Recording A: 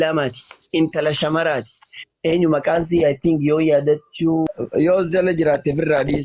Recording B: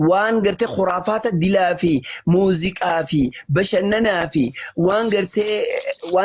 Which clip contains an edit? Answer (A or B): A